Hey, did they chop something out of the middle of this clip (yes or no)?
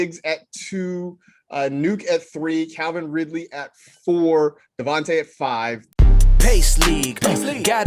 yes